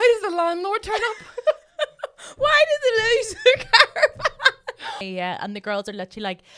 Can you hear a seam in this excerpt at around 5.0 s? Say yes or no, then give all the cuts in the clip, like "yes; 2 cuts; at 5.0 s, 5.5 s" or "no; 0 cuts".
yes; 1 cut; at 5.0 s